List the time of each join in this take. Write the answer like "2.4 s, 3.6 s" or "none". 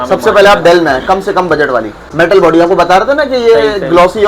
2.0 s

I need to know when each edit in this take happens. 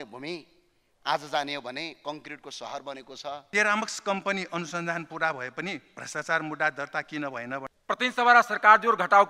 3.4 s, 7.7 s

